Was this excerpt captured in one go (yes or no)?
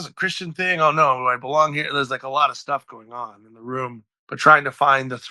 no